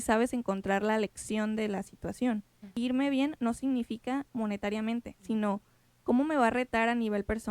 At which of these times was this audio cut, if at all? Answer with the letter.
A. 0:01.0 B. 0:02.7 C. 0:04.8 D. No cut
B